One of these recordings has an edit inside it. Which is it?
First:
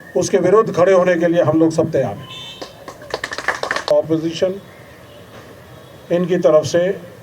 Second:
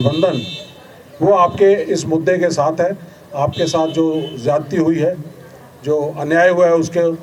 first; 1 cut; at 3.9 s

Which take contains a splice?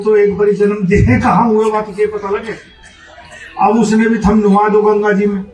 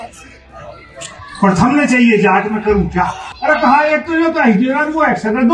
second; 1 cut; at 3.2 s

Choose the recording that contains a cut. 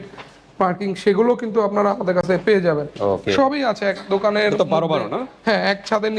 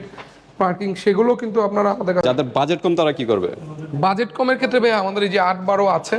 second; 1 cut; at 2.2 s

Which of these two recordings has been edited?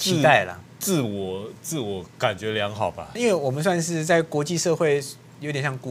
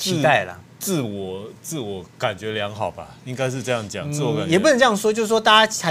first; 1 cut; at 3.1 s

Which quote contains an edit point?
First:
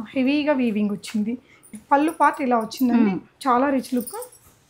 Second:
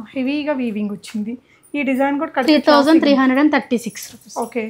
first; 1 cut; at 1.7 s

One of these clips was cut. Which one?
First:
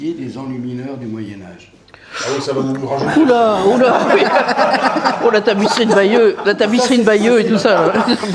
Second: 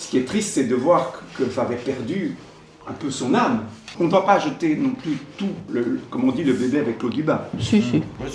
second; 2 cuts; at 3.8 s, 5.6 s

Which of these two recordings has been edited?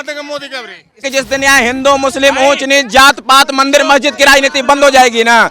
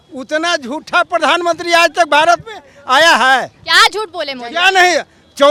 first; 1 cut; at 1.0 s

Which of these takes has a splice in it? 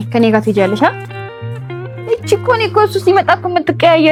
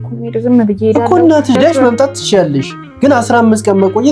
second; 1 cut; at 1.6 s

